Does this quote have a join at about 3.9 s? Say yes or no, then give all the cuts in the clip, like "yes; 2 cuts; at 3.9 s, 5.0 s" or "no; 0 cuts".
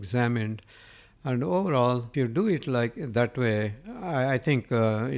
no; 1 cut; at 2.1 s